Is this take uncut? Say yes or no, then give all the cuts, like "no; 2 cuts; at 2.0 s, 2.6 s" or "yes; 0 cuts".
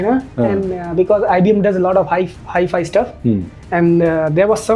yes; 0 cuts